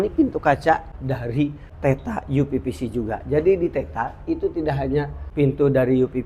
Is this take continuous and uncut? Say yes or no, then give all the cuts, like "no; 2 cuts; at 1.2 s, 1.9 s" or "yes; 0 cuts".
no; 2 cuts; at 1.2 s, 5.2 s